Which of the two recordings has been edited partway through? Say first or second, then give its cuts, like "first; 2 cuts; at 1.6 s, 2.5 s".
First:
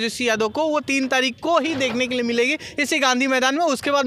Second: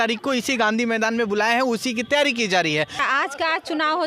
second; 1 cut; at 3.0 s